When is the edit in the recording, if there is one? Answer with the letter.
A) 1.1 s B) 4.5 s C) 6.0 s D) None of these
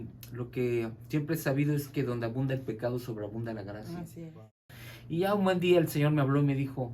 B